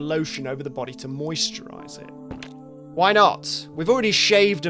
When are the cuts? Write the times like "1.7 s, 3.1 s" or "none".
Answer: 2.1 s